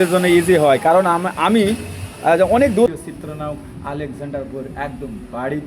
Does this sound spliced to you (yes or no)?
yes